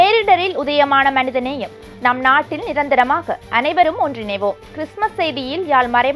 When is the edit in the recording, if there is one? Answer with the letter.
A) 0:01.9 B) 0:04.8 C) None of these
C